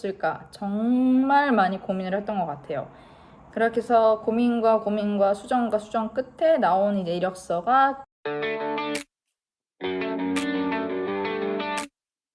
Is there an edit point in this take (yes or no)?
yes